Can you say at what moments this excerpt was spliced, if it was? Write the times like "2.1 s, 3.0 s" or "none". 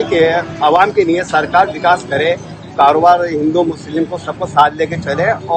none